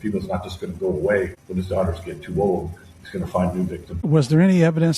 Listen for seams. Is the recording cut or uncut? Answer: cut